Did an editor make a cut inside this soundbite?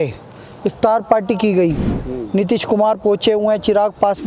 no; 0 cuts

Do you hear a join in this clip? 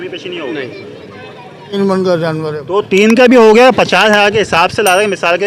yes; 1 cut; at 1.8 s

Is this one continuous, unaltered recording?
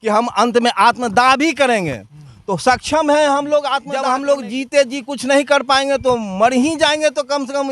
no; 1 cut; at 3.9 s

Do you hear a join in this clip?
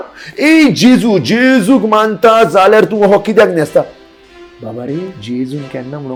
no; 0 cuts

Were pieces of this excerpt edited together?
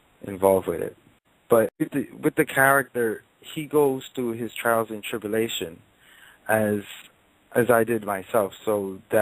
no; 0 cuts

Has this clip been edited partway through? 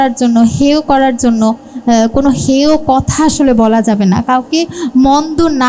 no; 0 cuts

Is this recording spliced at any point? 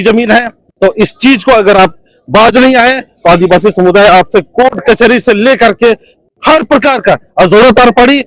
no; 0 cuts

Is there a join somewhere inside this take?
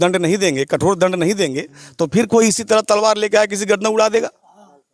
no; 0 cuts

